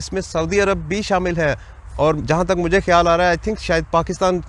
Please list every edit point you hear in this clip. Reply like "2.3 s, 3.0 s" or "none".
none

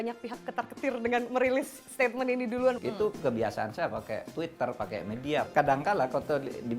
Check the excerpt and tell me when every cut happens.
2.8 s, 5.5 s

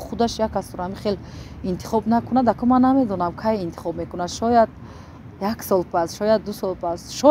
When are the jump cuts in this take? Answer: none

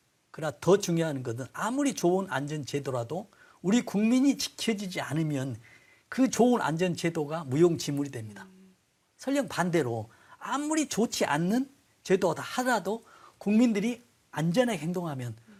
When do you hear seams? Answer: none

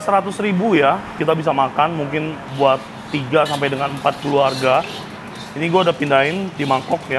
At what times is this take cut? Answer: 1.2 s, 2.5 s

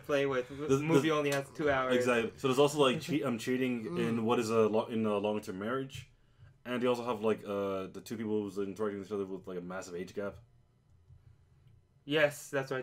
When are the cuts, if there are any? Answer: 6.8 s

